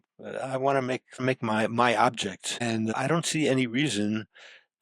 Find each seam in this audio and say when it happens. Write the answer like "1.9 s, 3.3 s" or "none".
1.2 s, 3.0 s